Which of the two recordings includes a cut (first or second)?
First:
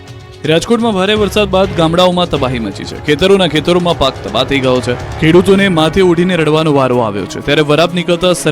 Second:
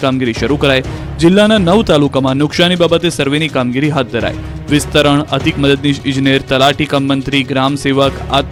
first